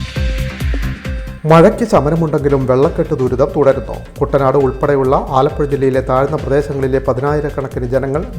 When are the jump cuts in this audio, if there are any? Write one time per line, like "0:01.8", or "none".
0:01.1